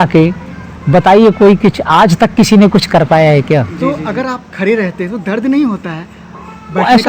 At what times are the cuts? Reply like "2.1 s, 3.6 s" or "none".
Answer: 3.7 s